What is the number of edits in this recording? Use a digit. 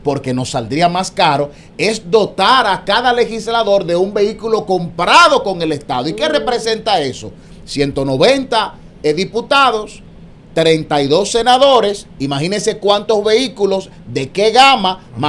0